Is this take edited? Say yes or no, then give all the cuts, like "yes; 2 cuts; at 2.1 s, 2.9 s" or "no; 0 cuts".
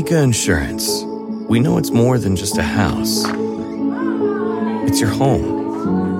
no; 0 cuts